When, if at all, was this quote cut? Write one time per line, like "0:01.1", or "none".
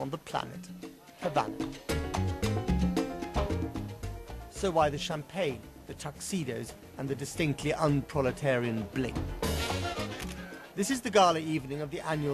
0:09.3